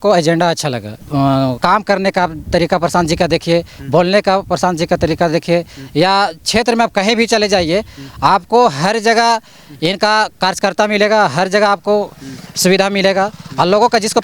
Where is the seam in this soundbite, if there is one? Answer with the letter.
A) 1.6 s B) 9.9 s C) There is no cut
A